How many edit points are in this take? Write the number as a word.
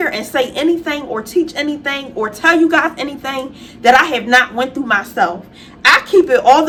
zero